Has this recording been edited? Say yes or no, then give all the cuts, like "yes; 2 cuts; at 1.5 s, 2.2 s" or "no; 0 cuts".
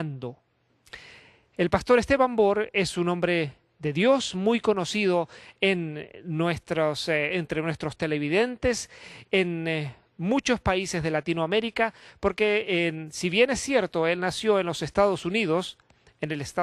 no; 0 cuts